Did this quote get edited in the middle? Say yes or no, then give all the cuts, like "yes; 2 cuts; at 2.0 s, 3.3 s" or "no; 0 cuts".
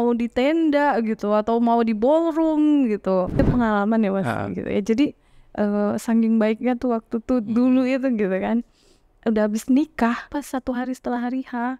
yes; 2 cuts; at 3.4 s, 10.4 s